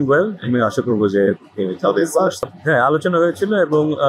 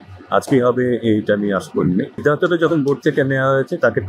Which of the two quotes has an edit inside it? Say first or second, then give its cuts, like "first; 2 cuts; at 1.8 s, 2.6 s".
second; 1 cut; at 2.1 s